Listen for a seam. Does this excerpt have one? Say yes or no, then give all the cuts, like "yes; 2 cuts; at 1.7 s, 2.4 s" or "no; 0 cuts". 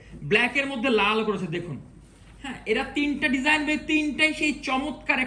no; 0 cuts